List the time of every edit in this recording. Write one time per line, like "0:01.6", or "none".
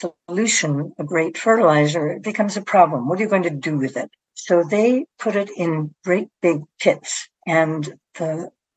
none